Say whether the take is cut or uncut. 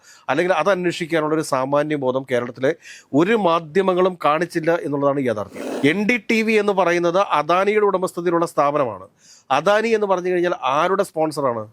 cut